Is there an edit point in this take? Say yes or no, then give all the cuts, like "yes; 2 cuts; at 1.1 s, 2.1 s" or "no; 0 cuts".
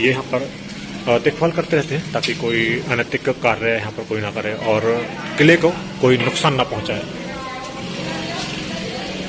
no; 0 cuts